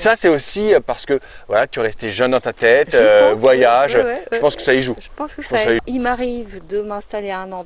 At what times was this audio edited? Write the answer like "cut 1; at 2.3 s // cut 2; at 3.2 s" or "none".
cut 1; at 5.8 s